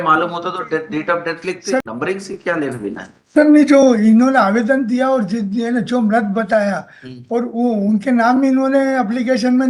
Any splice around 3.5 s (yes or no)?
no